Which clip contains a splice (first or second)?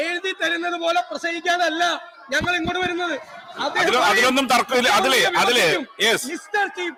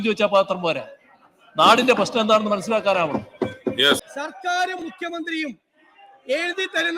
second